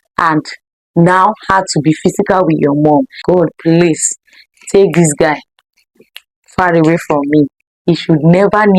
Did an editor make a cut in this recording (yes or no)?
yes